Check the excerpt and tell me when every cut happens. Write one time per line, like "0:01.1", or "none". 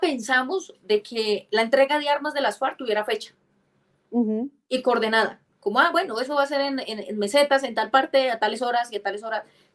none